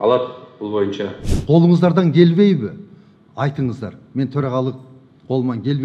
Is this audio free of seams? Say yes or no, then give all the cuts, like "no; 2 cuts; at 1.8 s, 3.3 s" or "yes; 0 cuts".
no; 1 cut; at 1.3 s